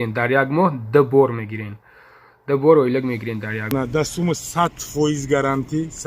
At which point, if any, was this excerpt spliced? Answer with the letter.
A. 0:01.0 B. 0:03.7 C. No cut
B